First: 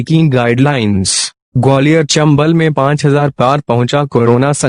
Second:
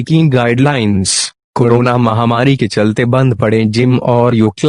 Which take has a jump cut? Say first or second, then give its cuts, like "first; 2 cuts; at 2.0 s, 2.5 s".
first; 2 cuts; at 1.4 s, 2.2 s